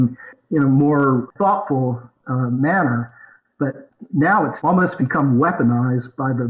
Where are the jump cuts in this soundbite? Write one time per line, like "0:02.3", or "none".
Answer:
0:01.3
0:04.6